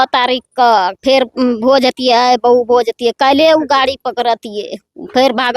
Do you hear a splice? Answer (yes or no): no